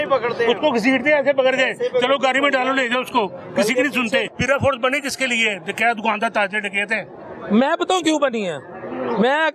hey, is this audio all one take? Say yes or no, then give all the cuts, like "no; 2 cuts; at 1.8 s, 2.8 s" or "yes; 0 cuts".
no; 1 cut; at 4.2 s